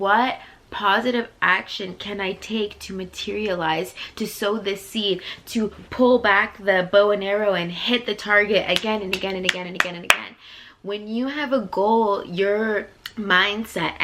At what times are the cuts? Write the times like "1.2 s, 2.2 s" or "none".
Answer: 13.0 s